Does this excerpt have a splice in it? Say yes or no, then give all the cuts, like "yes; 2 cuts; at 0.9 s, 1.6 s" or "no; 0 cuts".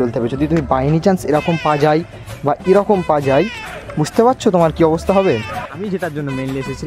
yes; 1 cut; at 5.5 s